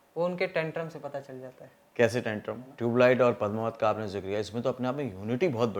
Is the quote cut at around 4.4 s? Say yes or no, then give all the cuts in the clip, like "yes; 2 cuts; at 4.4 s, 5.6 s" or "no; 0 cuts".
no; 1 cut; at 2.7 s